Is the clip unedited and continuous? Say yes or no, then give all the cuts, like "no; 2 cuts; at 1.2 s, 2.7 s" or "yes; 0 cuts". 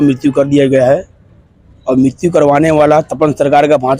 yes; 0 cuts